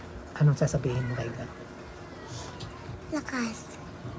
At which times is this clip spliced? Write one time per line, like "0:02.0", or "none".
none